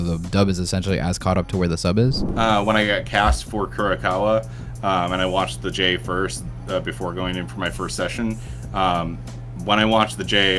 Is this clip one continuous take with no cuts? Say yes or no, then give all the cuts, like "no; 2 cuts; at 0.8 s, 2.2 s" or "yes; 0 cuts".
no; 1 cut; at 2.2 s